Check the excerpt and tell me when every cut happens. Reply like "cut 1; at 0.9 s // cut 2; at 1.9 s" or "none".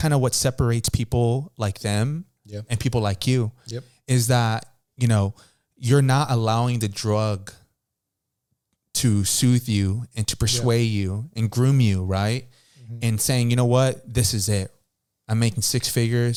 none